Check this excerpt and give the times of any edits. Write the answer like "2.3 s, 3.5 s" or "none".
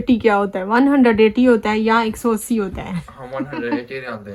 none